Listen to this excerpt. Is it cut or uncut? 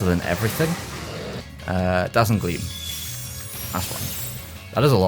cut